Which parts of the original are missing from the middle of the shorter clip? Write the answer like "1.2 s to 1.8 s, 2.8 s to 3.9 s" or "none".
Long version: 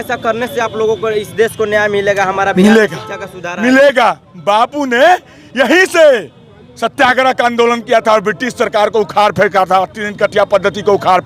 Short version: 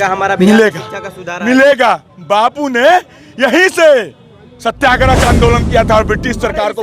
none

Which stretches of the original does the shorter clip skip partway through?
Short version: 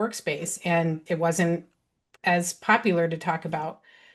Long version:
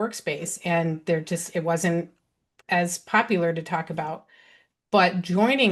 1.0 s to 1.4 s

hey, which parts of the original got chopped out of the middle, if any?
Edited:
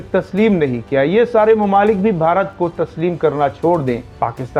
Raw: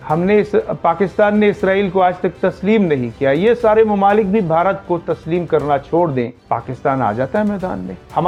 none

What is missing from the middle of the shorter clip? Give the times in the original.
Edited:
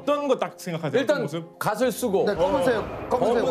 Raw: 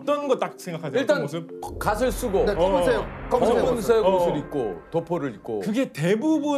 1.5 s to 1.7 s

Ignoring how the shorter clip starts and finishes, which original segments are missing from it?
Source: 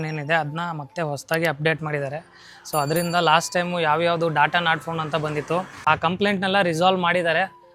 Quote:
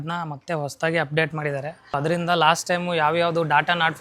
2.4 s to 2.8 s

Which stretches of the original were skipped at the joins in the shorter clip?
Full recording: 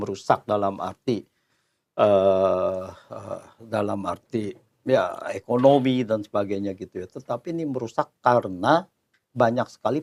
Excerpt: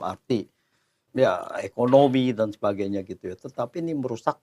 1.7 s to 4.6 s

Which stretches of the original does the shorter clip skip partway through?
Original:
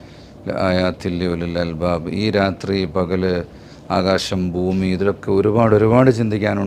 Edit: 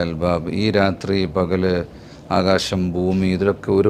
none

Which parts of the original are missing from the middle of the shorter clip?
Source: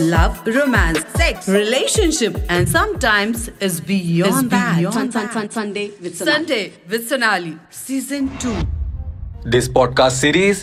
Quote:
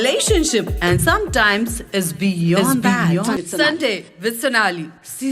5.0 s to 6.0 s

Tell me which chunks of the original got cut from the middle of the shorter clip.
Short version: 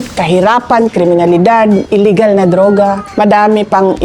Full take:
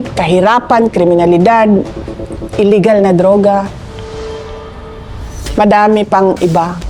1.9 s to 2.5 s, 3.7 s to 5.4 s

